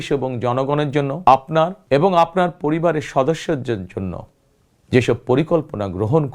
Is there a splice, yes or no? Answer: yes